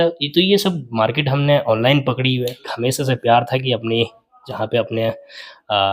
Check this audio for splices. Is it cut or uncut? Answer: cut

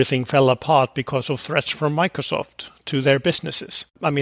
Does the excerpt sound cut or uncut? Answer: uncut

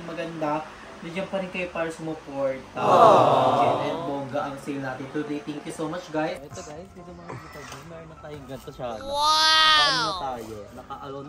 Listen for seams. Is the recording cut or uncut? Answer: cut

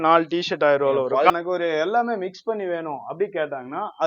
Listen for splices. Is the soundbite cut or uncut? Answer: cut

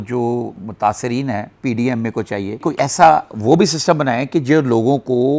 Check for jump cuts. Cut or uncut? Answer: uncut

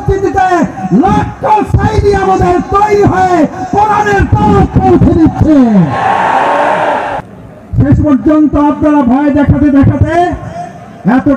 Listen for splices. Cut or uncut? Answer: cut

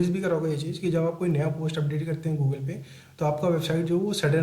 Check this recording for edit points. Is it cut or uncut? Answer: uncut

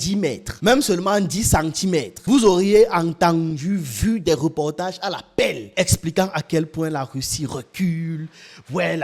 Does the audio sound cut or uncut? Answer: uncut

